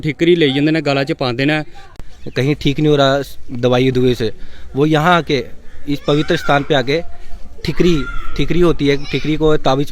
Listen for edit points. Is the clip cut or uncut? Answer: cut